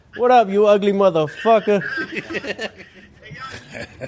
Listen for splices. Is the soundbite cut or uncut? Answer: uncut